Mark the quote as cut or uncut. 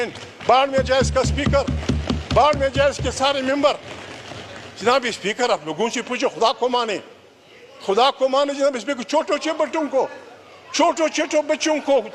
uncut